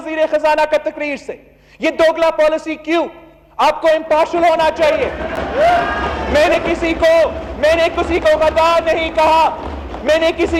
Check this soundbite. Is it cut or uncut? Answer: uncut